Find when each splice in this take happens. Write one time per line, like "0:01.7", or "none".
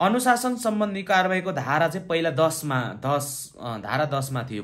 none